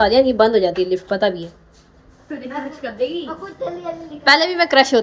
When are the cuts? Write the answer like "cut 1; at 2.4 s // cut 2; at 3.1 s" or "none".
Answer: none